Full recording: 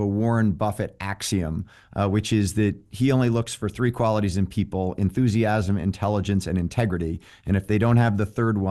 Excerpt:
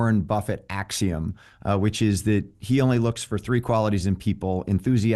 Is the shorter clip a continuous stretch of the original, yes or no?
yes